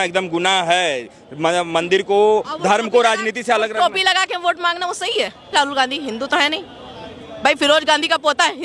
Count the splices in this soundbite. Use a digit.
1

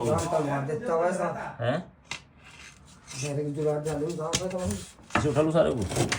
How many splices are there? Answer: 0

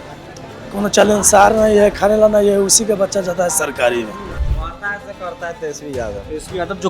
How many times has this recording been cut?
1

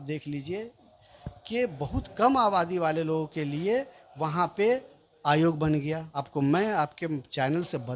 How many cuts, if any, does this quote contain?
1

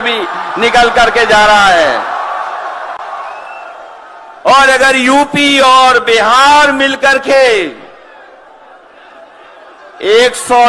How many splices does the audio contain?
0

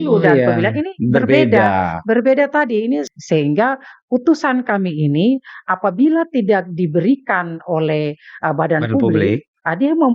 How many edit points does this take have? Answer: 1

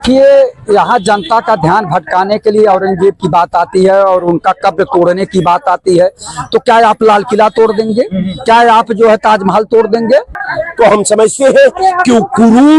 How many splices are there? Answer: 1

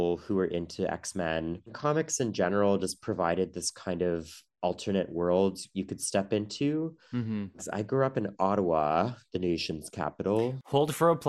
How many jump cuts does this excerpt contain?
2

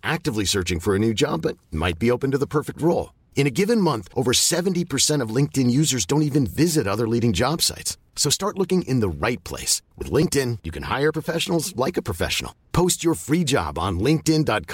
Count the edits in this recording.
0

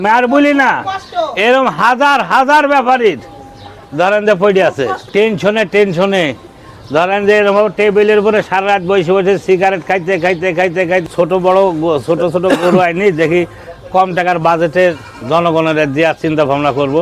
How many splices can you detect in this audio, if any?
2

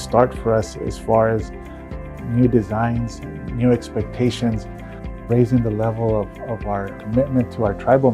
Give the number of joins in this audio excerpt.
1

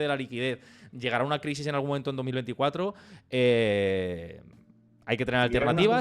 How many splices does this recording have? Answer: 0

